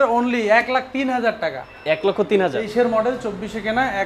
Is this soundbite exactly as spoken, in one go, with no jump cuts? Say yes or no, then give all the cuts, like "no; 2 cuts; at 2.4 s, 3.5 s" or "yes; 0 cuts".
no; 1 cut; at 2.6 s